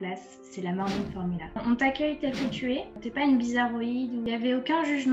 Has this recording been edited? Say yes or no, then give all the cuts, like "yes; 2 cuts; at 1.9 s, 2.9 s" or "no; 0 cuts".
yes; 3 cuts; at 1.6 s, 3.0 s, 4.3 s